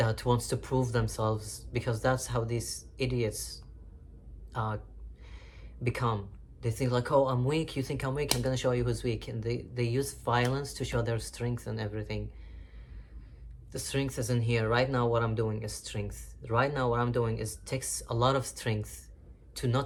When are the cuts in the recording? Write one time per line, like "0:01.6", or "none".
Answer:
none